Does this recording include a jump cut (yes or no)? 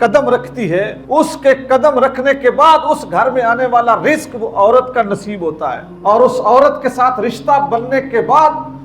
yes